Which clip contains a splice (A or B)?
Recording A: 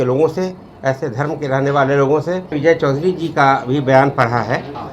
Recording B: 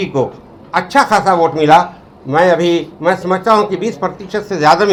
A